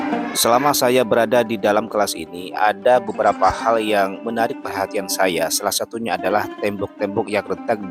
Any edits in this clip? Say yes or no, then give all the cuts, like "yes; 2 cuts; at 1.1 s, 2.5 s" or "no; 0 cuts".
no; 0 cuts